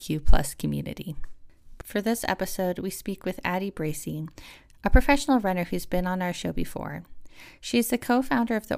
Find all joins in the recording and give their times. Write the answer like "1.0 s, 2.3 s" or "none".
1.8 s